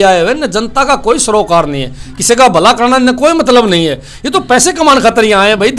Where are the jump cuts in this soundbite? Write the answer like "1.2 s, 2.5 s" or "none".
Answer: none